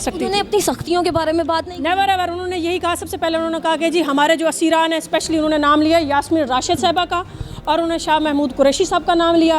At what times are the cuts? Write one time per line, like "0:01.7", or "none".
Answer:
none